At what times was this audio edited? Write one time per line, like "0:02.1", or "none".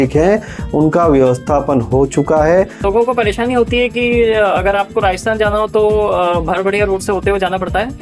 0:02.8